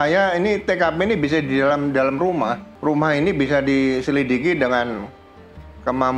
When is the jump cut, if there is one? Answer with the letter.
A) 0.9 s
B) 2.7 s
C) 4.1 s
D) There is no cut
B